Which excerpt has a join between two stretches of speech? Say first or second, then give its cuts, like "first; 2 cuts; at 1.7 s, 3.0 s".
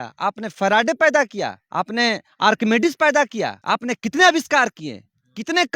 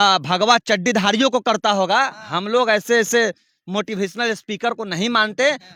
first; 2 cuts; at 1.6 s, 3.6 s